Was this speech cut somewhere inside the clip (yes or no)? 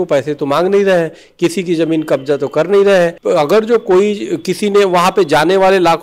yes